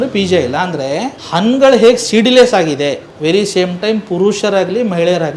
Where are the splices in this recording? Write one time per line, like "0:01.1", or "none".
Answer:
0:01.2
0:03.1